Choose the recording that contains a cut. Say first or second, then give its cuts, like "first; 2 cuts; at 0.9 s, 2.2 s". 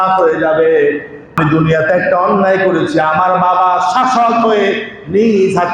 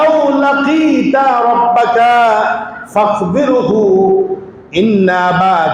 first; 1 cut; at 1.3 s